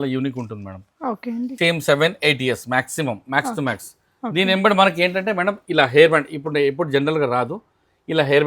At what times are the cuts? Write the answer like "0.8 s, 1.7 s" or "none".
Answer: 1.5 s